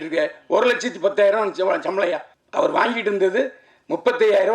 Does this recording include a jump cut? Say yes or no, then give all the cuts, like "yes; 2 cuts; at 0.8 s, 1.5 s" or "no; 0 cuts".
yes; 1 cut; at 2.3 s